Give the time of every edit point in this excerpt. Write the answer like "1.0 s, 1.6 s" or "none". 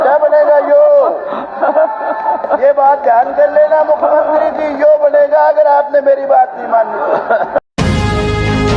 7.6 s

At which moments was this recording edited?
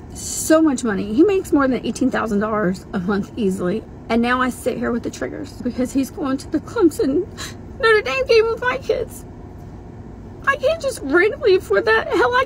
3.8 s, 5.6 s

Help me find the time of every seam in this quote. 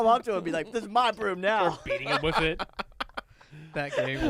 none

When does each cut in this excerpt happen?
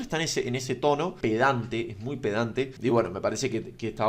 1.2 s, 2.7 s

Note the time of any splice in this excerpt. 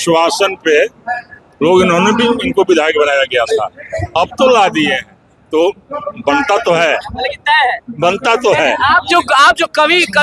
none

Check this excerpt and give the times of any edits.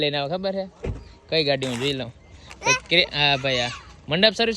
none

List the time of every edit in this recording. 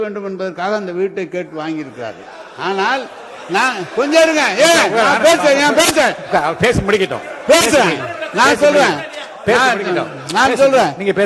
none

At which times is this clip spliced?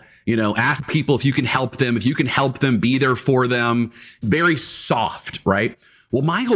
4.2 s

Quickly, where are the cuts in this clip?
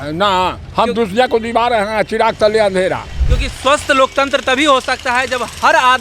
none

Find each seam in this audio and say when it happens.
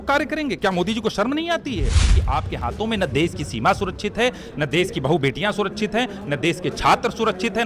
2.2 s

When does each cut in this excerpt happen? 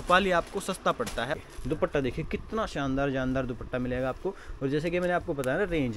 1.4 s

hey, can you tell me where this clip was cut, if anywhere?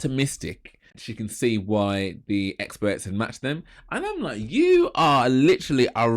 1.0 s

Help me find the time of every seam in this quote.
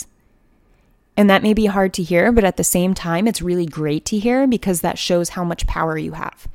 none

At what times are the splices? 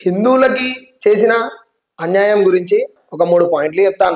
2.9 s

